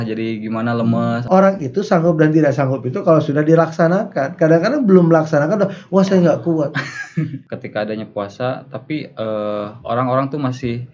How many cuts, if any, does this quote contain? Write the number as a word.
two